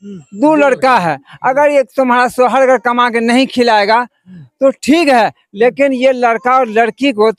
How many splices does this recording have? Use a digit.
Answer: 0